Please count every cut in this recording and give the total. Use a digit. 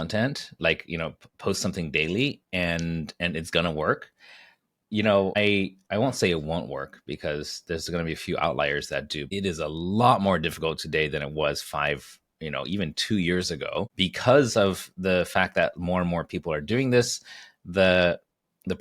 3